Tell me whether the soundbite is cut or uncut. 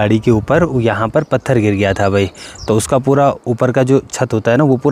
uncut